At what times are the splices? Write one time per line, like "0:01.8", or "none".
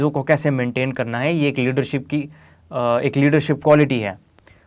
none